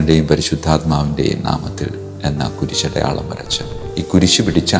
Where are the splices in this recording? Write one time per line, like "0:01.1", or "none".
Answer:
0:03.7